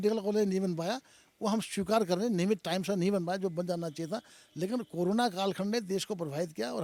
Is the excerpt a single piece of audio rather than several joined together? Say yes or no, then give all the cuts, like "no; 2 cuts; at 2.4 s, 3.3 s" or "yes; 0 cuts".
yes; 0 cuts